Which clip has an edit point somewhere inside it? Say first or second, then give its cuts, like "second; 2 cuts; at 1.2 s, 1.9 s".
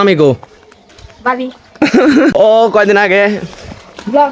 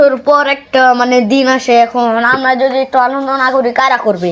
first; 1 cut; at 2.3 s